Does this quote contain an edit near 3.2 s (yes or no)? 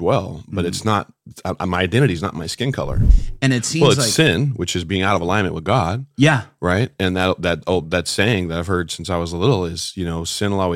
yes